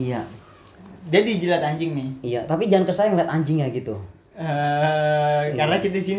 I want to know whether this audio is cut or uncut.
uncut